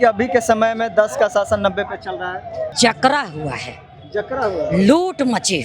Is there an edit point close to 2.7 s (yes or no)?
yes